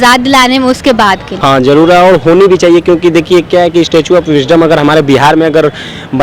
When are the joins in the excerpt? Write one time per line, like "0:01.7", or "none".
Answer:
0:01.3